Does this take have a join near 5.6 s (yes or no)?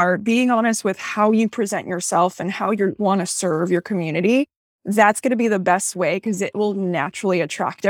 no